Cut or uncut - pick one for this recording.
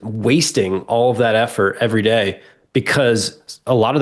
uncut